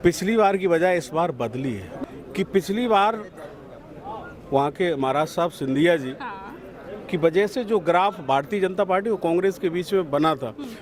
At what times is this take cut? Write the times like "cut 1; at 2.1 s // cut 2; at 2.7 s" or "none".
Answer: cut 1; at 1.9 s